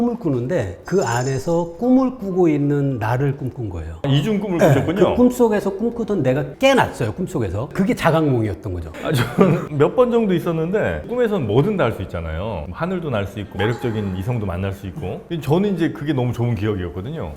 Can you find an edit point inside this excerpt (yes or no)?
yes